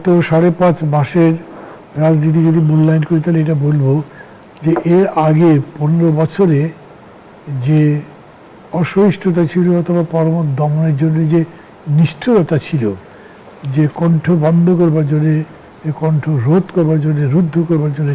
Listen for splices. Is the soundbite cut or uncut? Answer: uncut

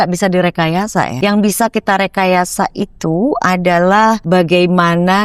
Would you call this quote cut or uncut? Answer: cut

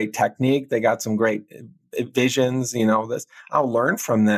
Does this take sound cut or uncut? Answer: uncut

